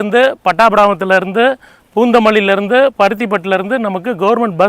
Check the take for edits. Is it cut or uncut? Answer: uncut